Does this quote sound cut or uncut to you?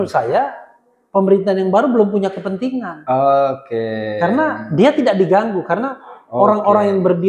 uncut